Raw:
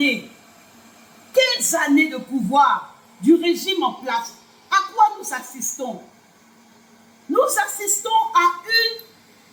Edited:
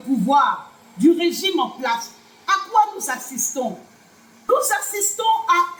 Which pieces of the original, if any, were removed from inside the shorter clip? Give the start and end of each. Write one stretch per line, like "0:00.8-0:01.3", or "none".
0:06.7-0:07.4